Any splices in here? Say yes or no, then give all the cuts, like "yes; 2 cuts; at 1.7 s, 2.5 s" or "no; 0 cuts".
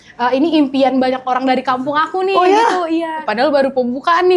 yes; 1 cut; at 3.3 s